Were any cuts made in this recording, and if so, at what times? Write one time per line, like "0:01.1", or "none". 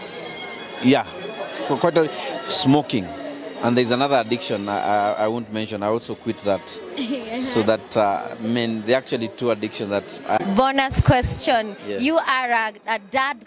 none